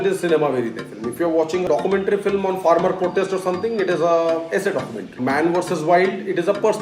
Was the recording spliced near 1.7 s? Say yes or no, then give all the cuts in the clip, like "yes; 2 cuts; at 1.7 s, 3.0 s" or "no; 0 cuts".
yes; 2 cuts; at 1.7 s, 5.2 s